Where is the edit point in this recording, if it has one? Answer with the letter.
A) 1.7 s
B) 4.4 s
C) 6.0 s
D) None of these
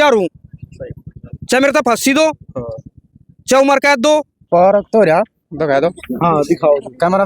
B